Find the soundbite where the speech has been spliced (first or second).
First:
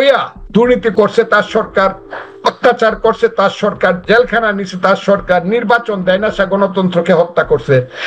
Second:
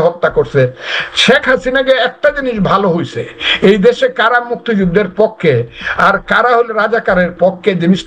first